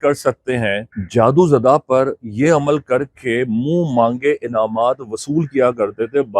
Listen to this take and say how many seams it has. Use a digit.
1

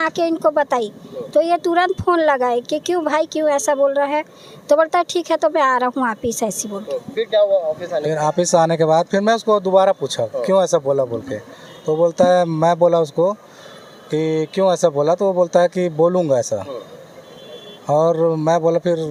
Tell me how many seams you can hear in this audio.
0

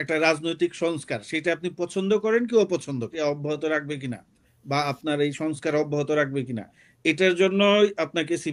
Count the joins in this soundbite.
1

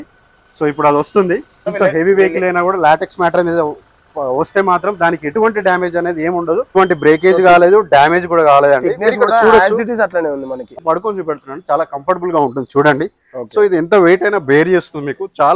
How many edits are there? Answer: 3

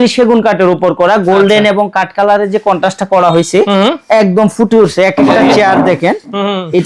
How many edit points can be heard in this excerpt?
0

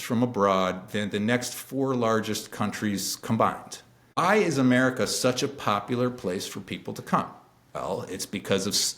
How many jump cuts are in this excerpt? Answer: 2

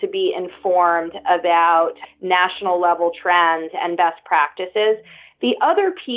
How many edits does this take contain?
1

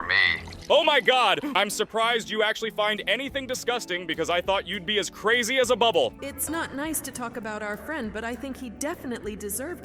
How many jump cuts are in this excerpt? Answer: 2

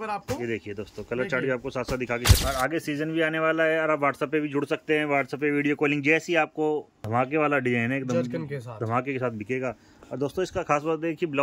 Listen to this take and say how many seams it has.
2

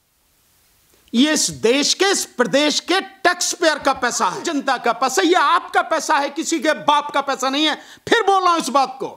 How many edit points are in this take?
1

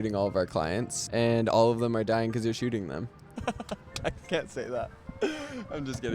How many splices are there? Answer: 1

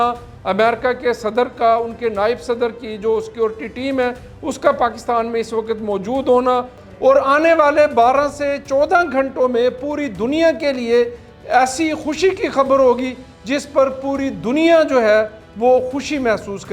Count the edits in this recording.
1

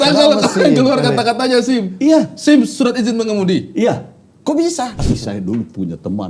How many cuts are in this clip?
1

